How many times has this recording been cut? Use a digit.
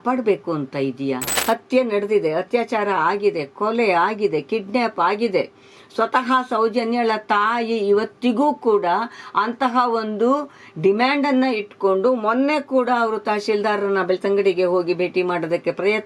1